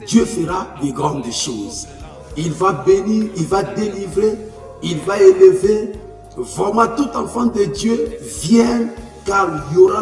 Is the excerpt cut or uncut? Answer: uncut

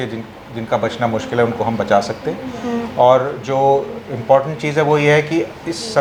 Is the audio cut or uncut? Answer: uncut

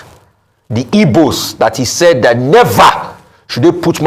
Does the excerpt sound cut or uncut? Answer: uncut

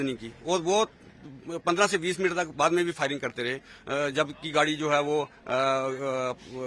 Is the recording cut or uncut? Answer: uncut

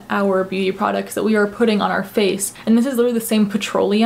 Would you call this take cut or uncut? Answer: cut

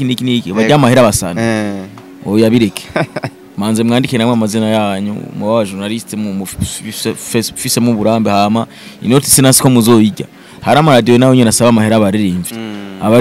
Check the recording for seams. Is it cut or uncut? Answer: uncut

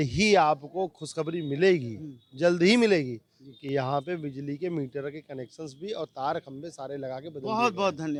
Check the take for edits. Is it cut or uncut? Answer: uncut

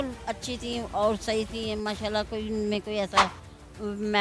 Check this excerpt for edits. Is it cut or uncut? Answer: uncut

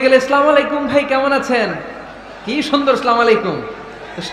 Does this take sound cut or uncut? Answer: uncut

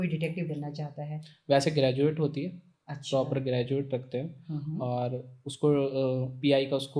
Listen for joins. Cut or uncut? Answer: uncut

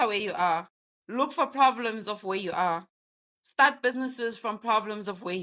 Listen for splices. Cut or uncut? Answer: uncut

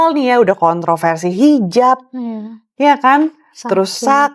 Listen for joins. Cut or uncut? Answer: uncut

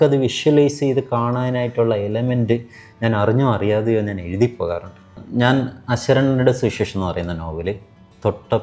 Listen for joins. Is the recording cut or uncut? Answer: cut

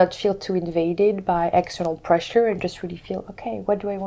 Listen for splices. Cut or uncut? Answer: uncut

